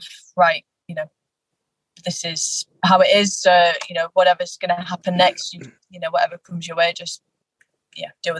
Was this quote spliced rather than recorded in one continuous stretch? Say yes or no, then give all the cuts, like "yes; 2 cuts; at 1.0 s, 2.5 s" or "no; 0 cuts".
yes; 1 cut; at 5.8 s